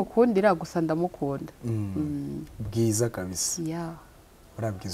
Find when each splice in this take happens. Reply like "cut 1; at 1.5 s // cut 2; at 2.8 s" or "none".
none